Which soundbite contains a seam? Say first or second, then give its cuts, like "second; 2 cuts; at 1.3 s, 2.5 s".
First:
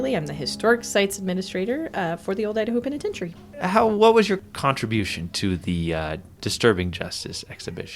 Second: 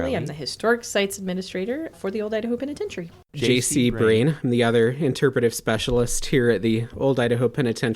second; 2 cuts; at 1.9 s, 3.4 s